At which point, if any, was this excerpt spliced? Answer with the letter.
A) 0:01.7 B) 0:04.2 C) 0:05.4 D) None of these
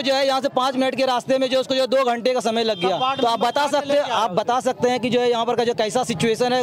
D